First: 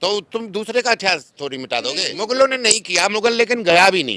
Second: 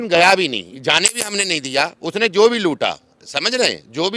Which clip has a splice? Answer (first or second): first